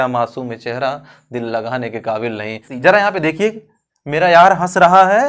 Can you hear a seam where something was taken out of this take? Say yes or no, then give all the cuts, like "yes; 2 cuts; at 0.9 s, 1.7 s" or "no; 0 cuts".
yes; 1 cut; at 2.7 s